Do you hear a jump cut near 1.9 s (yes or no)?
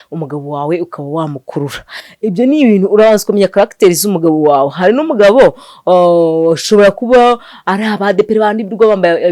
no